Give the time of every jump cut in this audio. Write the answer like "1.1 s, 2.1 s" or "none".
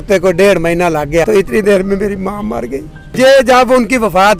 1.3 s, 3.0 s